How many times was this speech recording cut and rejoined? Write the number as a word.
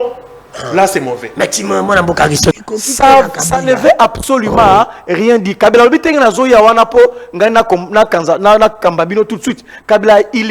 one